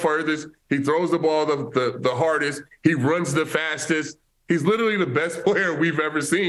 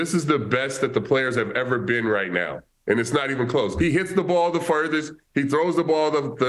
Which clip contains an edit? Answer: second; 1 cut; at 3.7 s

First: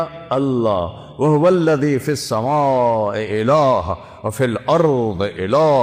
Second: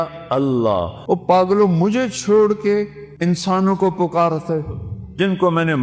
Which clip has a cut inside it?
second; 2 cuts; at 0.9 s, 3.0 s

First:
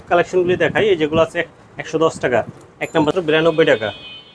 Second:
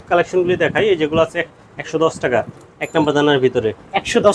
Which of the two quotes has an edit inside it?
first; 1 cut; at 3.2 s

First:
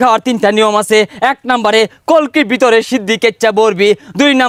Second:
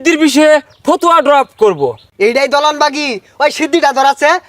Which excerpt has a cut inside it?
second; 1 cut; at 2.1 s

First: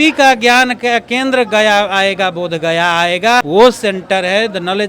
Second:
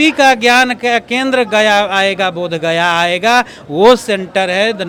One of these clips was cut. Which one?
first; 1 cut; at 3.5 s

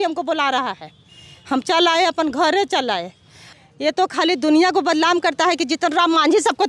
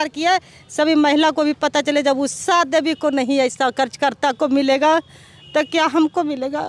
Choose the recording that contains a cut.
first; 1 cut; at 3.5 s

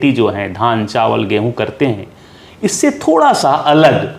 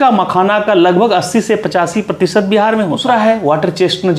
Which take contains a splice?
second; 1 cut; at 3.0 s

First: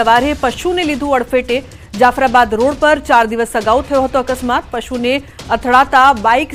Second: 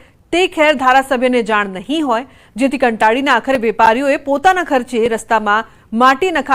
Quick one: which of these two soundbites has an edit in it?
second; 1 cut; at 5.4 s

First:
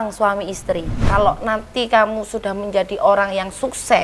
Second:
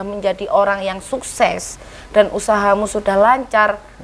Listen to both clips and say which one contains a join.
first; 1 cut; at 0.9 s

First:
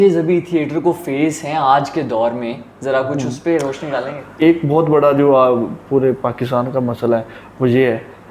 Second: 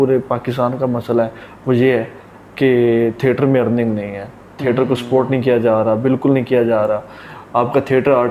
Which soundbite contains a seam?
first; 1 cut; at 4.3 s

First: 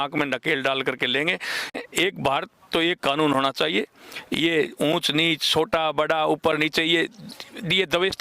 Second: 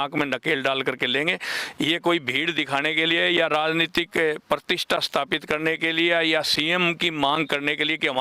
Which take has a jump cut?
first; 1 cut; at 1.8 s

